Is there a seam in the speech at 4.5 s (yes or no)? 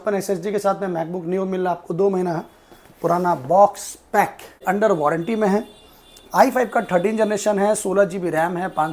yes